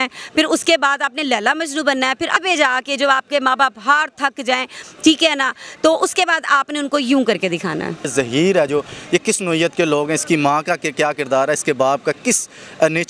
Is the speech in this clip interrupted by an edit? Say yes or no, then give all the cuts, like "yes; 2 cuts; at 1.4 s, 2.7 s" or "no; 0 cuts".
yes; 2 cuts; at 2.3 s, 8.1 s